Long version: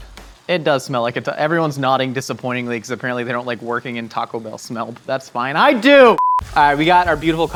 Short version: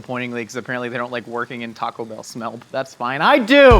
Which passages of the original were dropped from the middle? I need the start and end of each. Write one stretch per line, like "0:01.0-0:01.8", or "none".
none